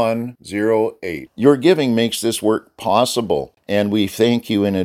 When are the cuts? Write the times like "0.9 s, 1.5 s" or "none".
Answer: 3.5 s